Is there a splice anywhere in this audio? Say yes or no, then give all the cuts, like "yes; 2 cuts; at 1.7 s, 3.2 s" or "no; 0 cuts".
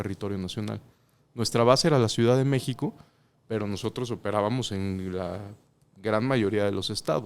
no; 0 cuts